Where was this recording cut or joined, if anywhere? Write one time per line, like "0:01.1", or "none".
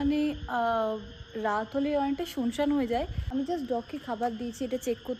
0:03.2